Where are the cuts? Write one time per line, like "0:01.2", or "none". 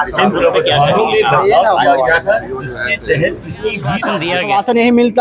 0:04.1